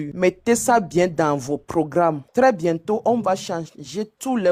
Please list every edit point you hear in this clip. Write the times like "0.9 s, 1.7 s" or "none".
none